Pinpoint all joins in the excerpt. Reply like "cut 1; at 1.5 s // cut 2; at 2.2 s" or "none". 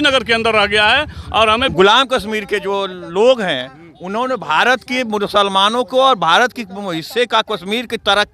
cut 1; at 1.7 s

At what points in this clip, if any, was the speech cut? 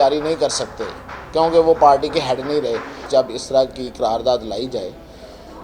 cut 1; at 3.0 s

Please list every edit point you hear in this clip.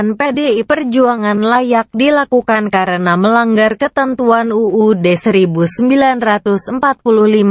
cut 1; at 5.2 s

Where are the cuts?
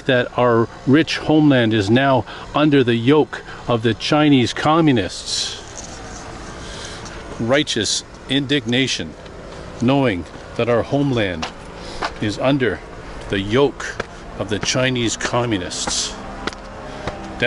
none

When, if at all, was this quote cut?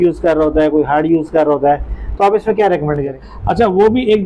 cut 1; at 3.3 s

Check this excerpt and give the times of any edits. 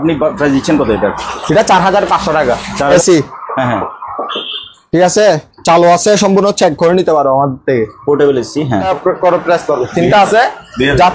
cut 1; at 2.9 s // cut 2; at 8.9 s

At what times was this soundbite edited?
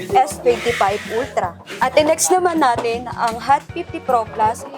cut 1; at 1.7 s

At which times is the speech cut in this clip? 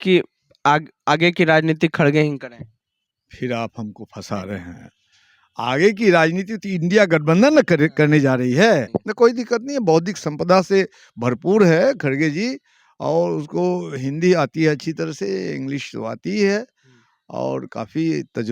cut 1; at 8.9 s

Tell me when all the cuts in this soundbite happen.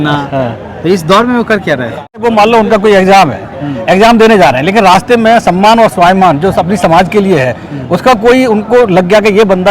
cut 1; at 2.2 s

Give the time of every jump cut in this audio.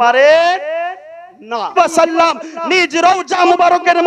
cut 1; at 1.8 s

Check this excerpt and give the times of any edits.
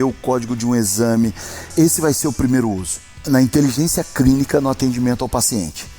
cut 1; at 1.7 s // cut 2; at 3.2 s

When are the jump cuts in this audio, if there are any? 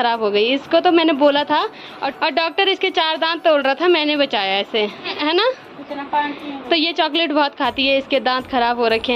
none

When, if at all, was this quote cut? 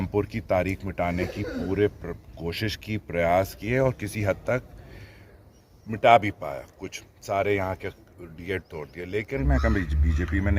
cut 1; at 9.4 s

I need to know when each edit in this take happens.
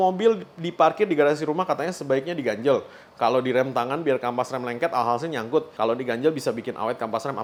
none

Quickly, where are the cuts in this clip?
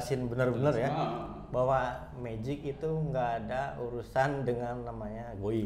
none

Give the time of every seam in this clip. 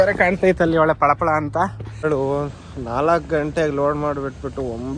cut 1; at 2.0 s

